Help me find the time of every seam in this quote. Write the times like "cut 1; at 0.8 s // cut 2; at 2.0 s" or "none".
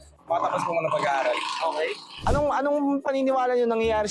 cut 1; at 2.1 s